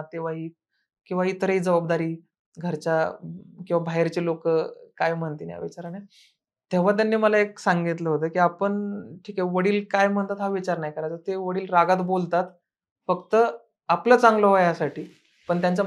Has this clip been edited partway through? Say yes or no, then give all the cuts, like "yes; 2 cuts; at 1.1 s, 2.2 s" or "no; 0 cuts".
no; 0 cuts